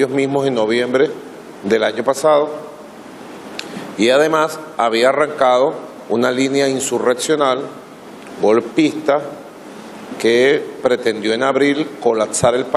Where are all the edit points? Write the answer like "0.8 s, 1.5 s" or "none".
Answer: none